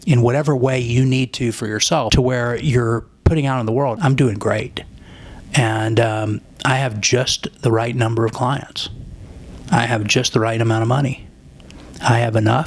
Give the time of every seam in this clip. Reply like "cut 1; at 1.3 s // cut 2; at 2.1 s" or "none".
cut 1; at 2.1 s // cut 2; at 4.0 s